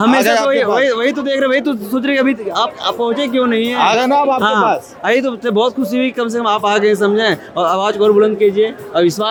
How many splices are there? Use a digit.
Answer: 0